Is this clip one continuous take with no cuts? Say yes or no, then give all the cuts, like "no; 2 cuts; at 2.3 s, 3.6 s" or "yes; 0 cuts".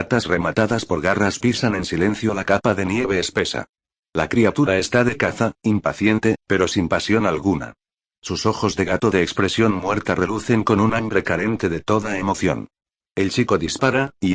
yes; 0 cuts